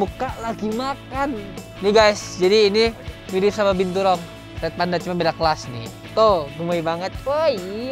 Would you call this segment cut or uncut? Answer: cut